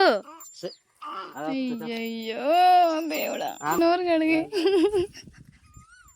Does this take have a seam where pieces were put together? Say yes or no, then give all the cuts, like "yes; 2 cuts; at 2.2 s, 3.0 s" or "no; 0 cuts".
yes; 1 cut; at 3.8 s